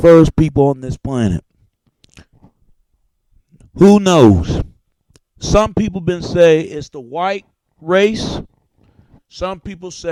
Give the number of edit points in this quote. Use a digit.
0